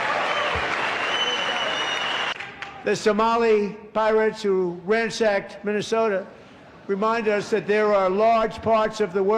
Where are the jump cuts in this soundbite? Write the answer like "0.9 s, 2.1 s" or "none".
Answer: 2.3 s